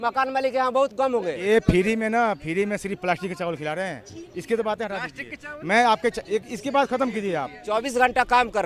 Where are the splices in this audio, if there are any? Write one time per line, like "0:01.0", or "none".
0:01.3
0:07.6

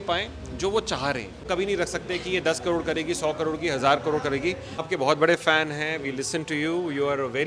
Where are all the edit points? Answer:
0:01.3
0:04.8

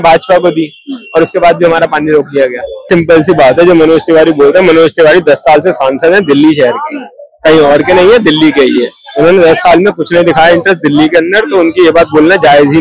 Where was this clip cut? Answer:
0:02.9

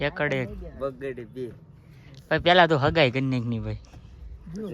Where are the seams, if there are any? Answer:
0:01.9

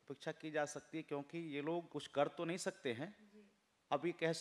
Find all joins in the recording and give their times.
0:02.0

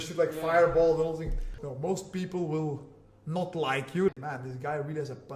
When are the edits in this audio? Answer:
0:01.5
0:04.1

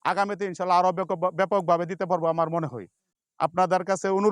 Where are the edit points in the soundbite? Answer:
none

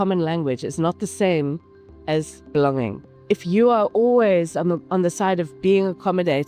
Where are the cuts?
0:03.1

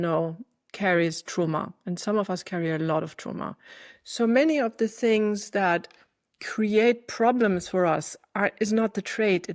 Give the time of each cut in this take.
none

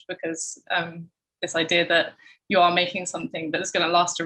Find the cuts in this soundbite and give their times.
none

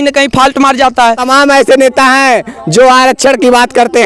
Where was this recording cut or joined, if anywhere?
0:01.2

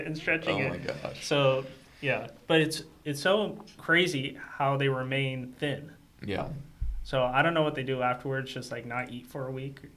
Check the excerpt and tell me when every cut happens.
none

